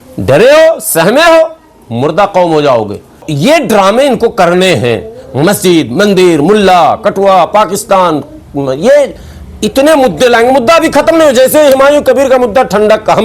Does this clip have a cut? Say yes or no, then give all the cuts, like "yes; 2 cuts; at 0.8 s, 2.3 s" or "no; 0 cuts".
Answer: yes; 1 cut; at 3.2 s